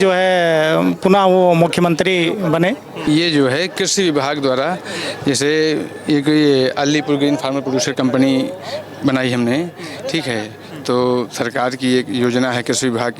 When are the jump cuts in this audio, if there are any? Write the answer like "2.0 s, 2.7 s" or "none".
2.9 s